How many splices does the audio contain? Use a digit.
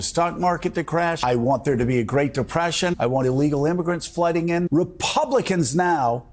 3